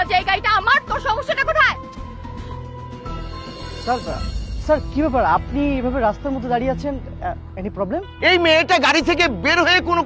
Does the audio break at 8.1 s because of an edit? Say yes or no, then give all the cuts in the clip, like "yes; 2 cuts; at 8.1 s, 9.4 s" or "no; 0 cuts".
yes; 1 cut; at 8.1 s